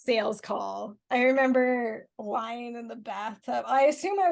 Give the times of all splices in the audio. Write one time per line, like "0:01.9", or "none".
0:00.9
0:02.1